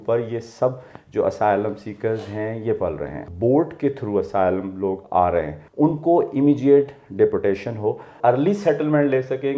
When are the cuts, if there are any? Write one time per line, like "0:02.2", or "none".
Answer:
0:03.3
0:05.6
0:08.1